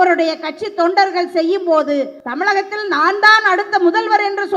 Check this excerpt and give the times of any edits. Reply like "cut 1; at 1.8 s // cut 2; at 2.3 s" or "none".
cut 1; at 2.2 s